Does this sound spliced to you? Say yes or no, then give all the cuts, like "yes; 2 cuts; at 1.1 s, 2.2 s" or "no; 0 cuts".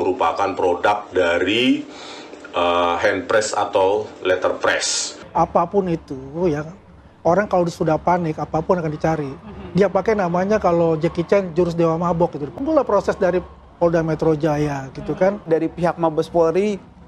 yes; 2 cuts; at 5.1 s, 15.5 s